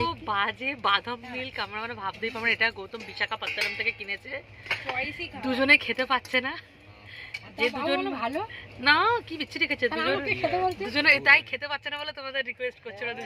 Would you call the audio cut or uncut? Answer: uncut